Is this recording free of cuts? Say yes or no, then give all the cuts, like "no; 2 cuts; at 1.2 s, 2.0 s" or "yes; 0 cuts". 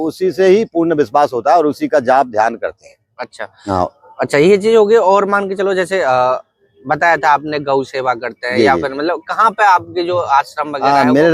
yes; 0 cuts